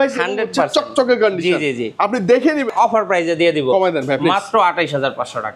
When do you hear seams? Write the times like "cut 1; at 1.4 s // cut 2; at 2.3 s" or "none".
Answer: cut 1; at 2.7 s